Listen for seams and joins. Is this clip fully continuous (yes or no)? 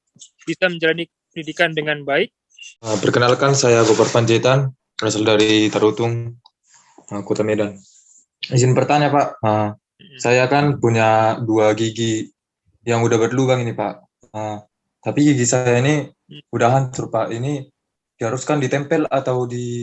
no